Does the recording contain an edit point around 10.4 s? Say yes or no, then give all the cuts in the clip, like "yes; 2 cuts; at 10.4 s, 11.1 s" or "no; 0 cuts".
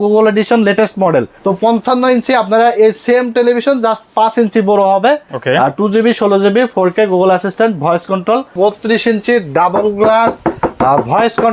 no; 3 cuts; at 1.3 s, 5.3 s, 8.5 s